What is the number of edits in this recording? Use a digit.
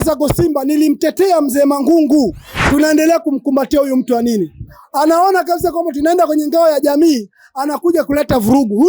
1